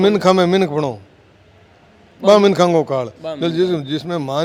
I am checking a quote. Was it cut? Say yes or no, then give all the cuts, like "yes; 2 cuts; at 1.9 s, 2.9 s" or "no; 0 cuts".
no; 0 cuts